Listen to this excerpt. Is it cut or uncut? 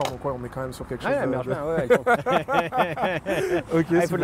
uncut